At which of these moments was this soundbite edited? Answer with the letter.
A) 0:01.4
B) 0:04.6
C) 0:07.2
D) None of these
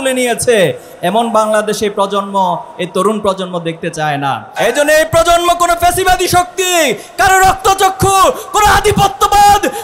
B